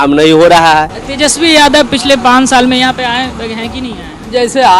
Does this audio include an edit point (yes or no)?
yes